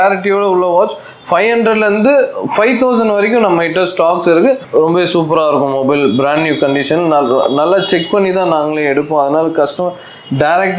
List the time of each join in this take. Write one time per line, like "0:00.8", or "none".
0:04.6